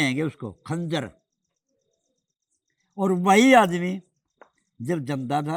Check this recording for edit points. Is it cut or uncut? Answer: uncut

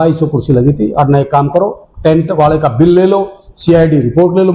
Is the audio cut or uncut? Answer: uncut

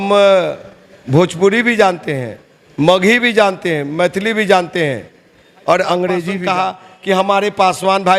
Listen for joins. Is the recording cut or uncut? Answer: cut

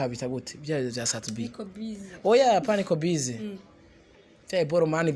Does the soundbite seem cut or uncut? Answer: uncut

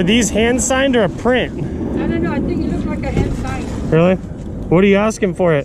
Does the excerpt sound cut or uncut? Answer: uncut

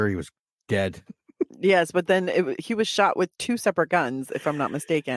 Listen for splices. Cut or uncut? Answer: uncut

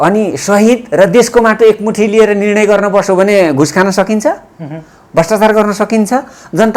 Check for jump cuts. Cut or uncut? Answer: uncut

